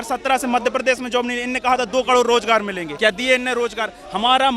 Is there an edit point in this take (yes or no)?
yes